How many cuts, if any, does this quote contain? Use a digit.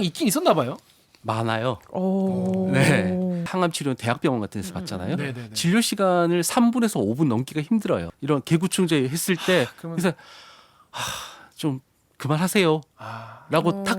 2